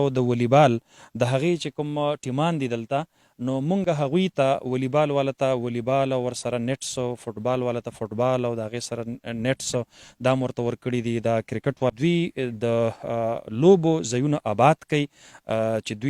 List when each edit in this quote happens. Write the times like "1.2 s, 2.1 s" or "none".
11.9 s